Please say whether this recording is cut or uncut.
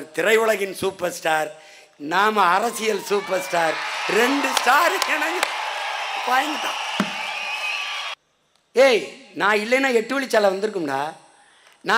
cut